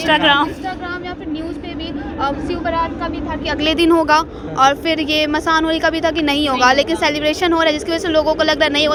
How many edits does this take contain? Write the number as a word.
zero